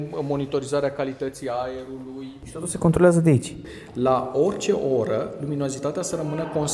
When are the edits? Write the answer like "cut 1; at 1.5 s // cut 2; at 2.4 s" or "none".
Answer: cut 1; at 2.4 s // cut 2; at 3.6 s